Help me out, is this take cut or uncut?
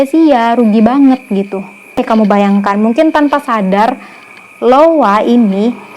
cut